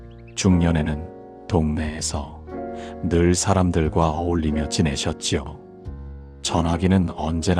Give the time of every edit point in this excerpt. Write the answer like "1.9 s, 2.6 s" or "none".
none